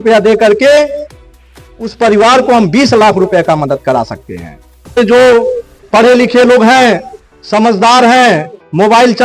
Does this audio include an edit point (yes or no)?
yes